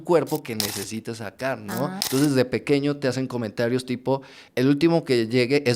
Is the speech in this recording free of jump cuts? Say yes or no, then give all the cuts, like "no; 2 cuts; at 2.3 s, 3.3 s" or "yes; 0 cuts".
no; 1 cut; at 2.0 s